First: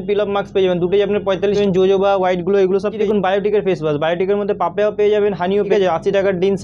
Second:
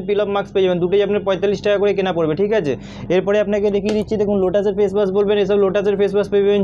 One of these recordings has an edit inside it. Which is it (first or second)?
first